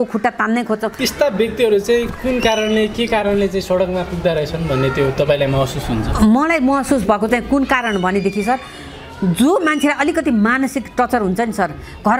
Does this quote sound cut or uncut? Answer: cut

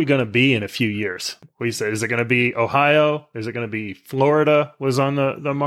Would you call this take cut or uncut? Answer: cut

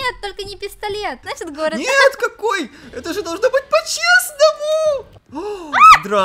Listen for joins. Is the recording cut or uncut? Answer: cut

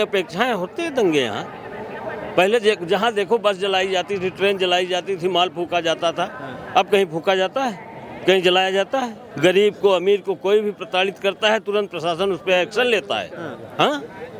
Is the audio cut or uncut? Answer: cut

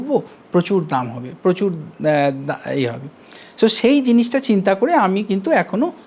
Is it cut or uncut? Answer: uncut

